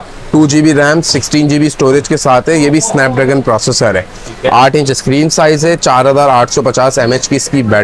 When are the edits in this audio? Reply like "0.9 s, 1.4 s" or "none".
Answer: none